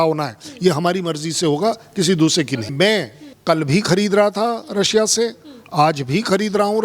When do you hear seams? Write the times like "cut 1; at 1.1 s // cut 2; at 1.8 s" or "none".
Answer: cut 1; at 2.7 s